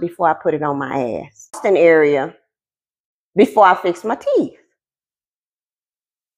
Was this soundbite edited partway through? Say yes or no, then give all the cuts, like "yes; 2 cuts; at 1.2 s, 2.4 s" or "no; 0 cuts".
yes; 1 cut; at 1.6 s